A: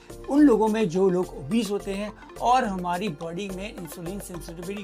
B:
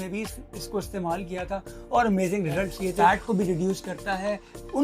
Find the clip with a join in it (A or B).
B